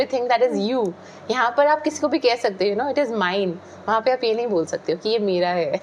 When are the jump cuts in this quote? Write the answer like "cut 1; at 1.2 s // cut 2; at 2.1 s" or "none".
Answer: none